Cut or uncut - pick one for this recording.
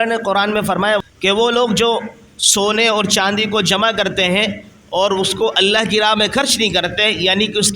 cut